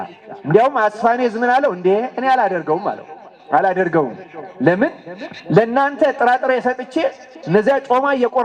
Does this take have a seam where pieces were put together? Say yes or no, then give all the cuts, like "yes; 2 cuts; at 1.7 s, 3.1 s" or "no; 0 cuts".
no; 0 cuts